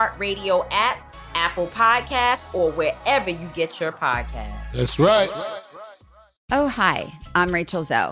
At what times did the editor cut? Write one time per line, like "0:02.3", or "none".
0:06.3